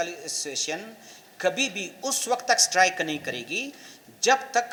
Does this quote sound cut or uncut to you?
uncut